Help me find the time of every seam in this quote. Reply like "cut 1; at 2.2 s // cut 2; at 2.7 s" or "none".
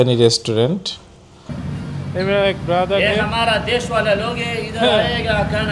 cut 1; at 1.5 s